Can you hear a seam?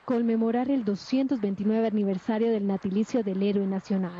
yes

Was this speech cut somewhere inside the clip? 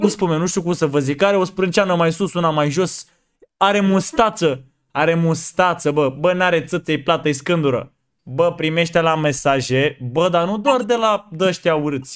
no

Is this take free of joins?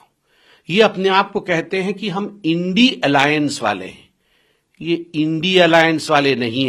yes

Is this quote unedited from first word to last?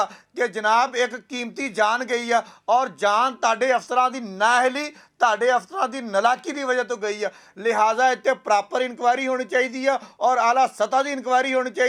yes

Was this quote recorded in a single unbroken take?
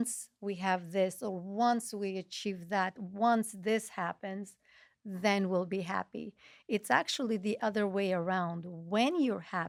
yes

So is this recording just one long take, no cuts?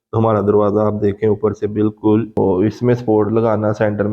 no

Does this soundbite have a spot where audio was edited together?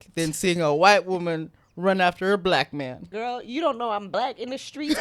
yes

